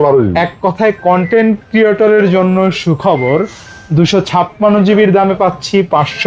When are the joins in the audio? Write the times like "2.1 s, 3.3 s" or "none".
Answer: none